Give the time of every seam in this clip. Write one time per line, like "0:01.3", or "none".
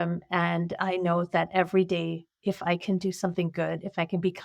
none